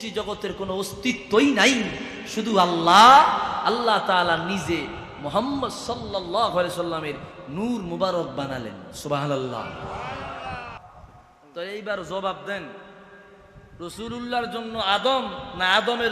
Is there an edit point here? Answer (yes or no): yes